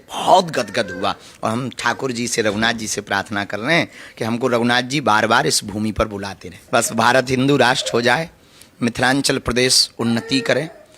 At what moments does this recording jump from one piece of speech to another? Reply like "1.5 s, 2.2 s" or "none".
6.5 s